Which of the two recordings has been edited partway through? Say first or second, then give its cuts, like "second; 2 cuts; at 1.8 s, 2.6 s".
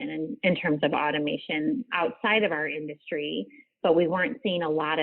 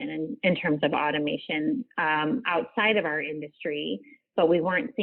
first; 1 cut; at 1.9 s